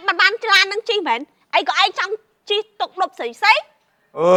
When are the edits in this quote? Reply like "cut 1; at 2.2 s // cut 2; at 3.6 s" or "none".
none